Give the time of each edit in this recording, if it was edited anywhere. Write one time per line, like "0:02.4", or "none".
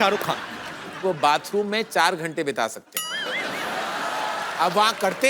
0:01.0